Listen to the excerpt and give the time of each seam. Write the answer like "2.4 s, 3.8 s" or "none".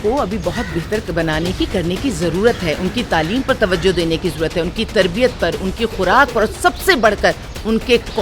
none

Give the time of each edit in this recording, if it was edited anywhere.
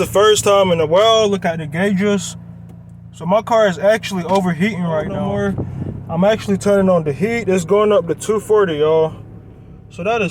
5.2 s

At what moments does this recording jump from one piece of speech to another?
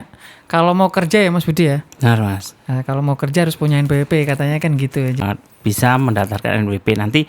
5.2 s

